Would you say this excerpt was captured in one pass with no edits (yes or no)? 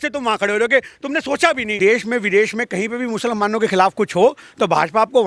no